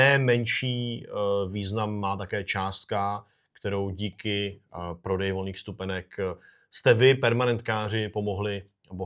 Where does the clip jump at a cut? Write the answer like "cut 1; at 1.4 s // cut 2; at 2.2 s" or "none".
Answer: none